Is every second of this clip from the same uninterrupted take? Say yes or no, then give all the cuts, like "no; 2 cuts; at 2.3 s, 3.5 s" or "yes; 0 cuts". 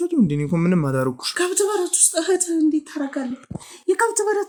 yes; 0 cuts